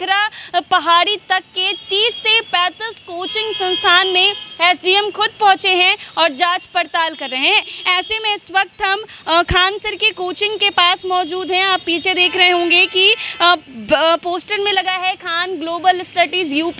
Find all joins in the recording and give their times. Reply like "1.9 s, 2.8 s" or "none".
none